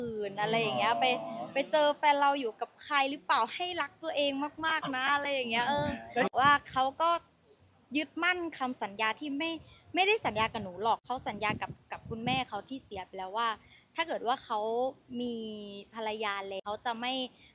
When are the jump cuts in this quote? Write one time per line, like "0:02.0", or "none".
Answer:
0:06.3
0:11.0
0:16.6